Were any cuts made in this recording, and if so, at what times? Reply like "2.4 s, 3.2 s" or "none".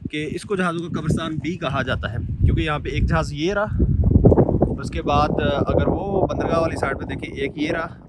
none